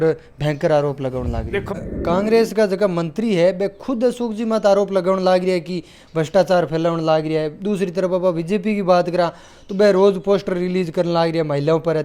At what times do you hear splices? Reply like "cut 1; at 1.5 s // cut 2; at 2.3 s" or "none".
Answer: cut 1; at 1.6 s